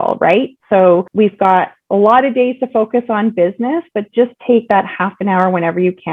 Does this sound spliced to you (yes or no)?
no